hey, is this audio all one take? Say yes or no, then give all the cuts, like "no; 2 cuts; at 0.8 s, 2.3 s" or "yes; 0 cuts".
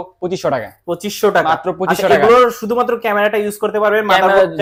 yes; 0 cuts